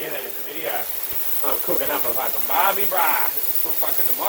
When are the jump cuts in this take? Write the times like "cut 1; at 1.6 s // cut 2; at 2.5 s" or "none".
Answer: none

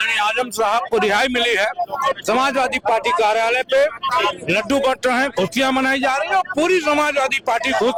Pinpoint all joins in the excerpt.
none

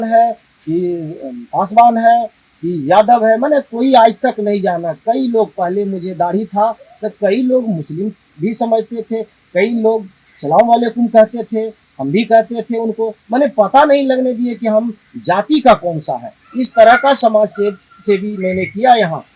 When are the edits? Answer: none

